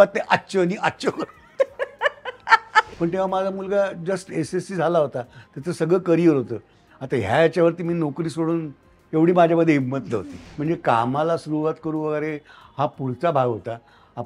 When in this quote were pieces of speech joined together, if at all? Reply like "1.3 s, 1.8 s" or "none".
2.9 s, 10.1 s